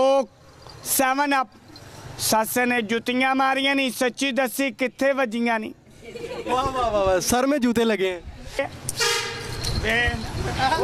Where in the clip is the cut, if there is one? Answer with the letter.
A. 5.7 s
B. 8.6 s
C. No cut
B